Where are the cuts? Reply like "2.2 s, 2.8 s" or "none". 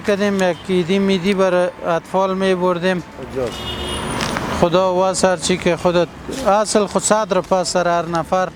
none

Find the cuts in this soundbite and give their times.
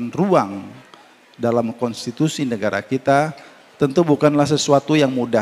none

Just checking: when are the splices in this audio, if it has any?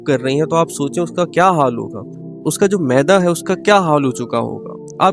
none

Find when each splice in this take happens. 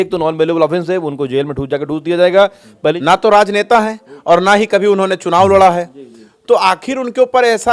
3.0 s

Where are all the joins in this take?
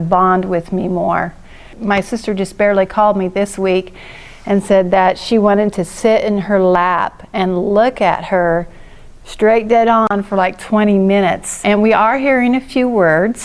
1.4 s, 11.5 s

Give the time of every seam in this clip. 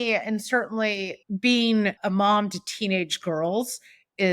1.1 s, 2.0 s

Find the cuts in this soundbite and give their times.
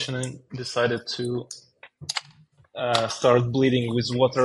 none

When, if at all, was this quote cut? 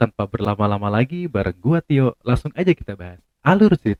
none

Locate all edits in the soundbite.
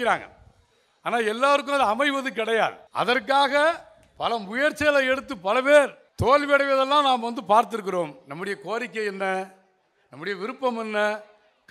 2.8 s, 6.0 s

